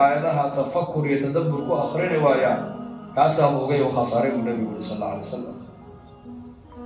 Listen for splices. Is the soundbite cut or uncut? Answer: uncut